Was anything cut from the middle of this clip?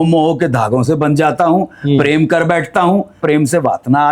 yes; 1 cut; at 3.2 s

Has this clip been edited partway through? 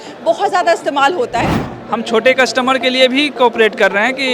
yes; 1 cut; at 1.7 s

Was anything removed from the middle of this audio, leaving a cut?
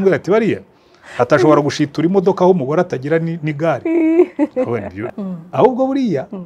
yes; 1 cut; at 5.1 s

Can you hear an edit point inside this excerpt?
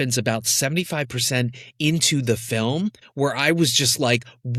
no; 0 cuts

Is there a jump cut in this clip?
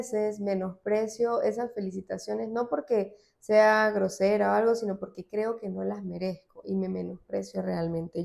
no; 0 cuts

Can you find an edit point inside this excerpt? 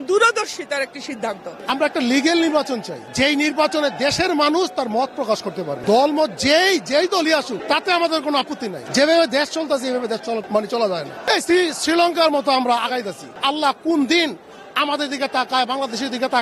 yes; 8 cuts; at 1.6 s, 3.0 s, 5.8 s, 7.6 s, 8.8 s, 10.4 s, 11.2 s, 13.3 s

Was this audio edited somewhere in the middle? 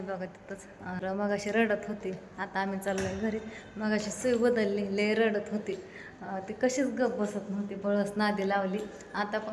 yes; 1 cut; at 1.0 s

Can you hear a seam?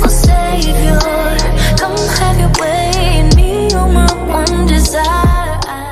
no; 0 cuts

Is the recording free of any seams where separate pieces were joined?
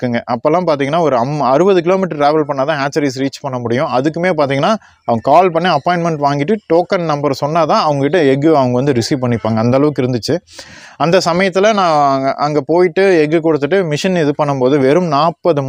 yes; 0 cuts

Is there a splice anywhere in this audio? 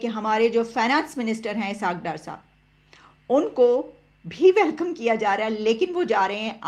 no; 0 cuts

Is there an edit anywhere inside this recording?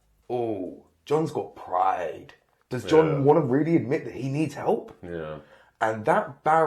no; 0 cuts

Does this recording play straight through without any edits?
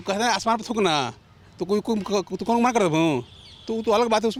yes; 0 cuts

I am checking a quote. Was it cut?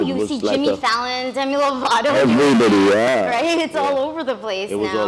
no; 0 cuts

